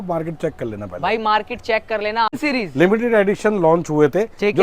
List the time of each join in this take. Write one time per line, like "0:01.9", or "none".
0:02.3